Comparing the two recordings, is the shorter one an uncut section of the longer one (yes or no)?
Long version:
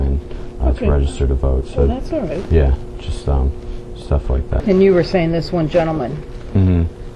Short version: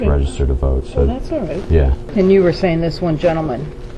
no